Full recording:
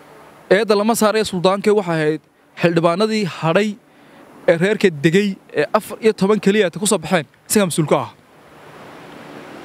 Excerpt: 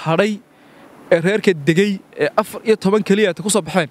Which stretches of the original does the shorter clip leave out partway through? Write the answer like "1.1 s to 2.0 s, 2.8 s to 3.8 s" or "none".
none